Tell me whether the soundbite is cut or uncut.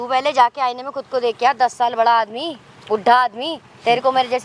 uncut